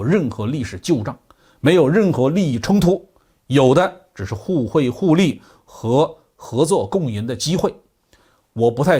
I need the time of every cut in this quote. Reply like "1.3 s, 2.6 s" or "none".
none